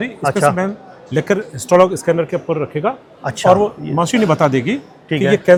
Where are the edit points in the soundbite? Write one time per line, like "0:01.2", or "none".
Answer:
none